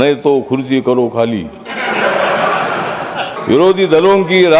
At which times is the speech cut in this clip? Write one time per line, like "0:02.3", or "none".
0:03.4